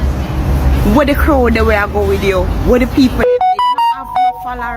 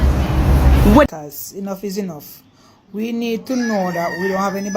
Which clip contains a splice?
second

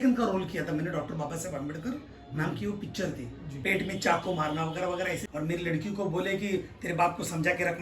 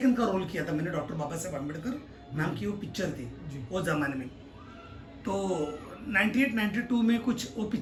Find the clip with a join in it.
first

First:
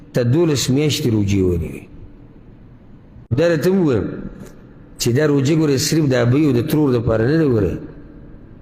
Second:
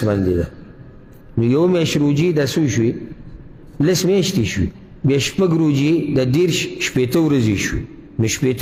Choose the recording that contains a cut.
first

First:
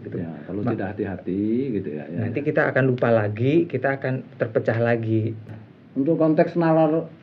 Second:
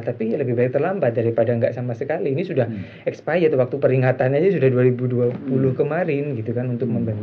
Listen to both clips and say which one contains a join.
first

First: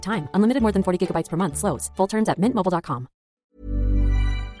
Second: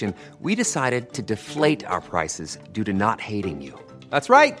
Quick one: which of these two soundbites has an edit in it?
first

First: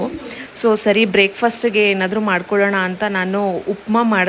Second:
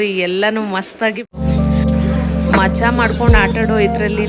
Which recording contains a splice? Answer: second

